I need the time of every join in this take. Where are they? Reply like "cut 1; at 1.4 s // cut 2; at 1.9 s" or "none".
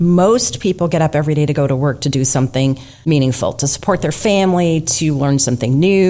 cut 1; at 2.9 s